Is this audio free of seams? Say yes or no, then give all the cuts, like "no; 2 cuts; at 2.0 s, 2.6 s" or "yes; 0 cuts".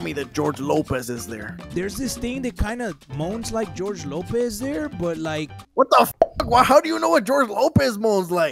yes; 0 cuts